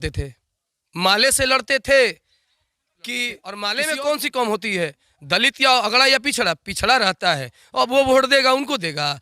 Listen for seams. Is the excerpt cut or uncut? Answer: cut